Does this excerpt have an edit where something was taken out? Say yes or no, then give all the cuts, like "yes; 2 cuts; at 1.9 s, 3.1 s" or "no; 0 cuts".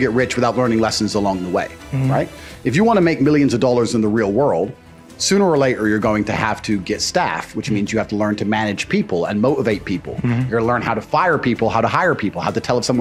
no; 0 cuts